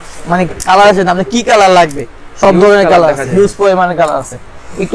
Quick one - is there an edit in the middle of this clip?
no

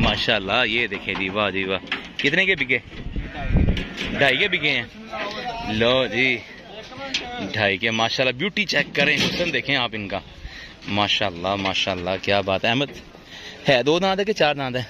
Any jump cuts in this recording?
no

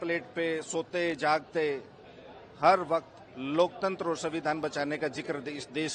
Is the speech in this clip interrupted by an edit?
no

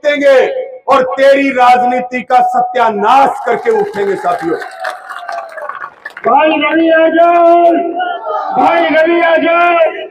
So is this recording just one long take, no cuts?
yes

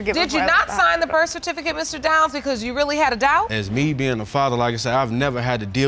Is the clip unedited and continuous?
yes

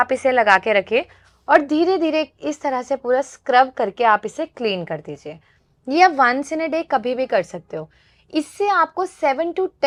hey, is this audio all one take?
yes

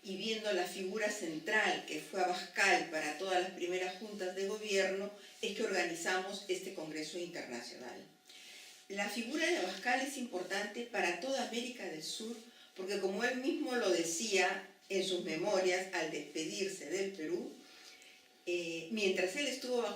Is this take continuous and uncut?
no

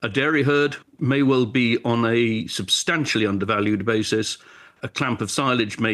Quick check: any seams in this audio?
yes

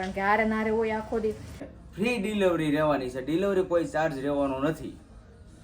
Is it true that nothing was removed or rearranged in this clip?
no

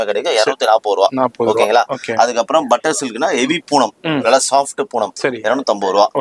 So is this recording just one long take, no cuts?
yes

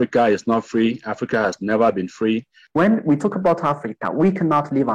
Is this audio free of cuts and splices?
no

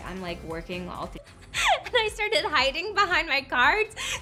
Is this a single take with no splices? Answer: yes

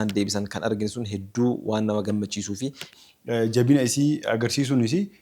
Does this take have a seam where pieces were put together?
yes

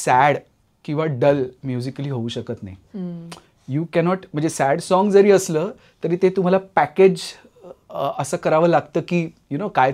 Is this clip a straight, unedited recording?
yes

